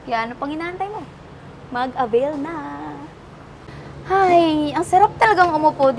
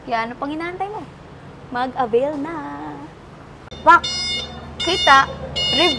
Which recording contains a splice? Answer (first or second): second